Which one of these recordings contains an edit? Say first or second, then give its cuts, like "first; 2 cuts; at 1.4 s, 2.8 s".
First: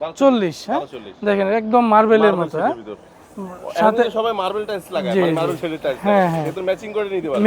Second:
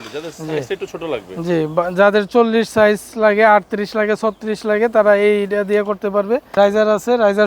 second; 1 cut; at 6.5 s